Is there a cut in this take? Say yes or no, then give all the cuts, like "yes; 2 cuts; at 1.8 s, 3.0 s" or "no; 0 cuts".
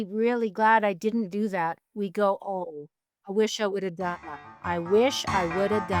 yes; 2 cuts; at 2.6 s, 4.3 s